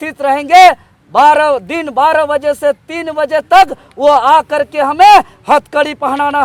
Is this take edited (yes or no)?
no